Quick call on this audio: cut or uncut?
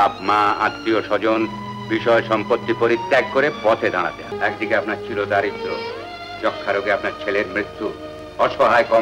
cut